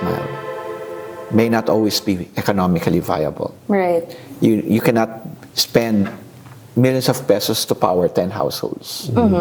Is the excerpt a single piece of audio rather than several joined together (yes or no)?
yes